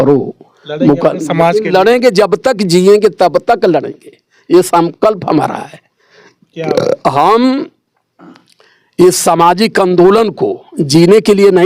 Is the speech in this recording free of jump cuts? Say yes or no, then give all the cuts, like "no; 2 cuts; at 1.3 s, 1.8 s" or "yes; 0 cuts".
yes; 0 cuts